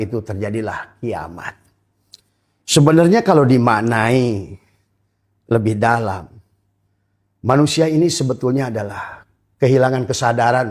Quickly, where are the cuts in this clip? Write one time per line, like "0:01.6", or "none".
none